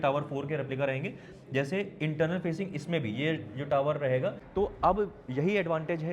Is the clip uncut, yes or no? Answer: no